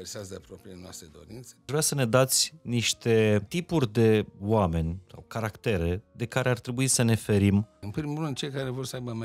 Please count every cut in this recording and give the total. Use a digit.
3